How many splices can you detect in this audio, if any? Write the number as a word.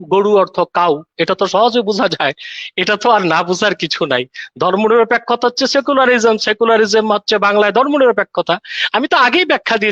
zero